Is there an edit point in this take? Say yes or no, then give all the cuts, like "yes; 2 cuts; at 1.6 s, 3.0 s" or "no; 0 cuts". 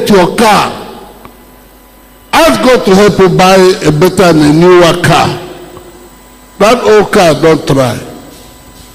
no; 0 cuts